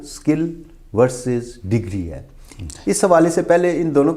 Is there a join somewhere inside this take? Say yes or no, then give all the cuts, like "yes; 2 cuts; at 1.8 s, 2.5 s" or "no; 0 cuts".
no; 0 cuts